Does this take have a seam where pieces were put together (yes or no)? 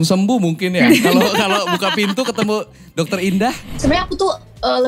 yes